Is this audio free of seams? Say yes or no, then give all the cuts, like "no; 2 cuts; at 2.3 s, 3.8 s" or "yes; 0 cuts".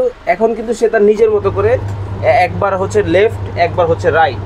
yes; 0 cuts